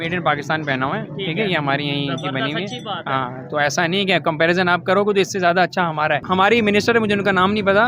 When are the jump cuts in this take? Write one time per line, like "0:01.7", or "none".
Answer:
0:06.2